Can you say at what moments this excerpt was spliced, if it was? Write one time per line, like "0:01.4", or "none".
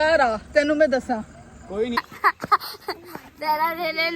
0:02.0